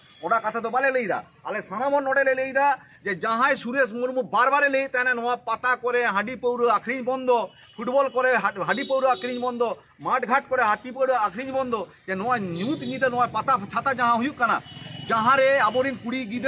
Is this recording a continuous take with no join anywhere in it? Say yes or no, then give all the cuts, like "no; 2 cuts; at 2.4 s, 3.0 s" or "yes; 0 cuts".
yes; 0 cuts